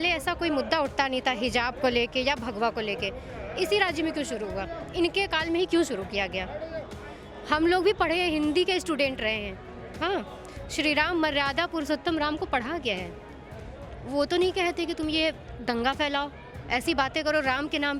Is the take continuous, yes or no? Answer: yes